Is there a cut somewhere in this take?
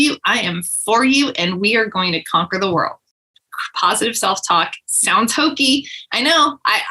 yes; 1 cut; at 3.1 s

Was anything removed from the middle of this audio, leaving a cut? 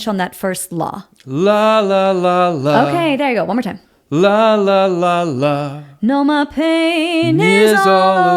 no; 0 cuts

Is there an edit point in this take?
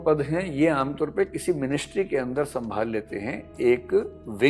no; 0 cuts

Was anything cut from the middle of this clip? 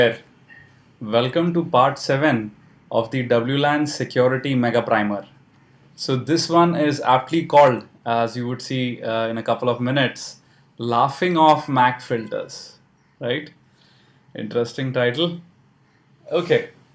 no; 0 cuts

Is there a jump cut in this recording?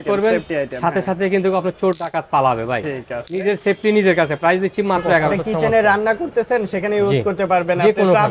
yes; 1 cut; at 5.3 s

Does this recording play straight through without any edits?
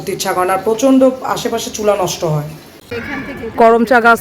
no; 1 cut; at 3.1 s

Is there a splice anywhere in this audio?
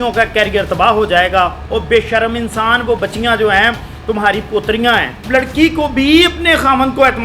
yes; 1 cut; at 5.2 s

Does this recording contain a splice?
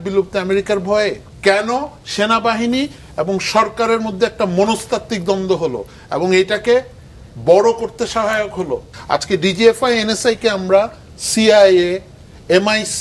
yes; 2 cuts; at 1.3 s, 8.9 s

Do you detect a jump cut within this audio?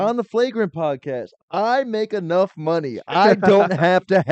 yes; 1 cut; at 1.4 s

